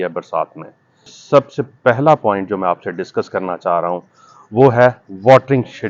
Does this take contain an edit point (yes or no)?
yes